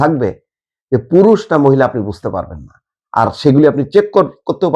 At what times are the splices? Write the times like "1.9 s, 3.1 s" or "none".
none